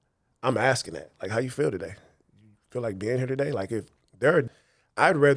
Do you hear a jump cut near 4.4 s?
yes; 1 cut; at 4.4 s

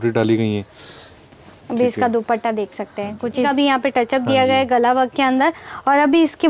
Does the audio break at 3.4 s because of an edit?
yes; 1 cut; at 3.4 s

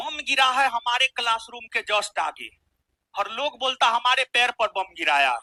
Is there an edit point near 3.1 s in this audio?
no; 0 cuts

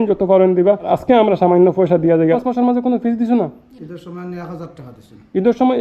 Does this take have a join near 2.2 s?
yes; 1 cut; at 2.2 s

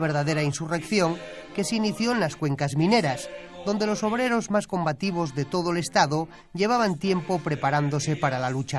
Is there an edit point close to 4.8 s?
yes; 1 cut; at 4.8 s

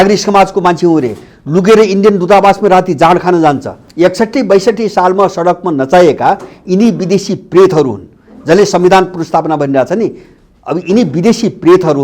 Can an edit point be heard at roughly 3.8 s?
yes; 1 cut; at 3.8 s

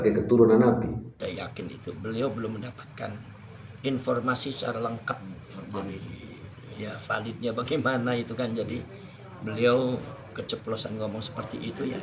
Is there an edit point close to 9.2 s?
no; 1 cut; at 1.2 s

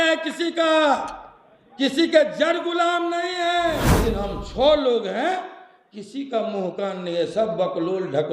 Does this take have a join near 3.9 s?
yes; 1 cut; at 3.9 s

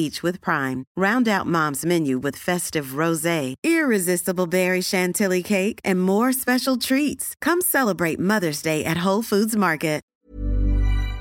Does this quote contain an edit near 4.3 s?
no; 1 cut; at 10.1 s

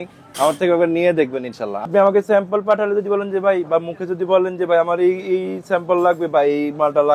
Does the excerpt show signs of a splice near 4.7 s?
no; 1 cut; at 1.9 s

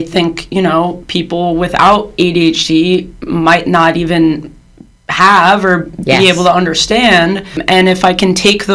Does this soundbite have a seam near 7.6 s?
yes; 1 cut; at 7.6 s

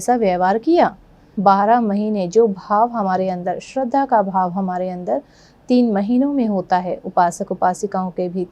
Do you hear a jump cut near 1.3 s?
yes; 1 cut; at 1.3 s

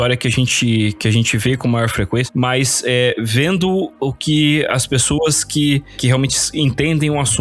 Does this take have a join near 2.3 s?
yes; 1 cut; at 2.3 s

